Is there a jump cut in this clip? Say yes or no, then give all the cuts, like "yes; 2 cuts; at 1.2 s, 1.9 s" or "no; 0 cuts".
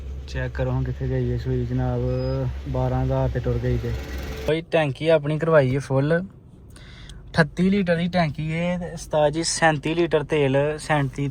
yes; 1 cut; at 4.5 s